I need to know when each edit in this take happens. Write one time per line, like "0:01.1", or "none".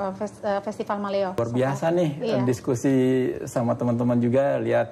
0:01.4